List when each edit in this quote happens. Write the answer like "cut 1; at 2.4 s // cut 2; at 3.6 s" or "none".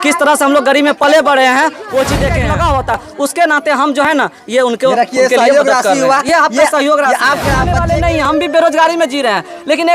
cut 1; at 2.4 s // cut 2; at 7.7 s